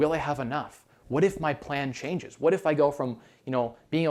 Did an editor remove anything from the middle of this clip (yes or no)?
no